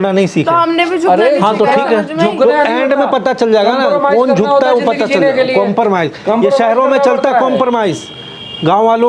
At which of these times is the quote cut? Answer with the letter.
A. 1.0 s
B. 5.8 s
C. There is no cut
C